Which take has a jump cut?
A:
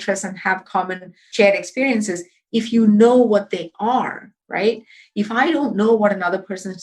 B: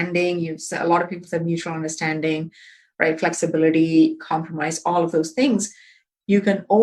A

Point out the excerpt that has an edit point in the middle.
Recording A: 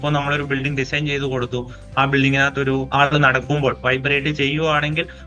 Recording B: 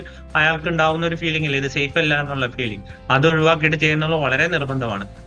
A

